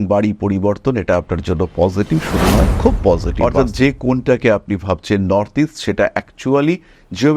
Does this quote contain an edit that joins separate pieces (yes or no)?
yes